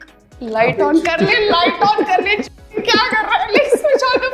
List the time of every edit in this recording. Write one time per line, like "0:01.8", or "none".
none